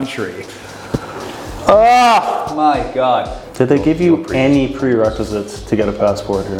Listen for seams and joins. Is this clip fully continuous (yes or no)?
no